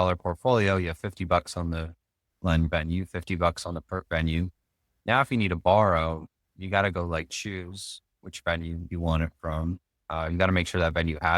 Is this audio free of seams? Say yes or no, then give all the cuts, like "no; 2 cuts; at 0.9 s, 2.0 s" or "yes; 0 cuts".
yes; 0 cuts